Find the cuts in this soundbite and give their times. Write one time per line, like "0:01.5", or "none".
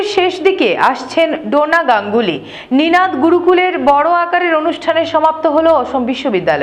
none